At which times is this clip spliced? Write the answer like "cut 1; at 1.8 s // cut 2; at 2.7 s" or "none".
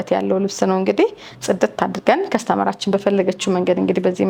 none